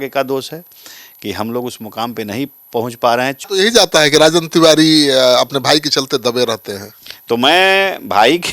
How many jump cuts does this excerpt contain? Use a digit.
1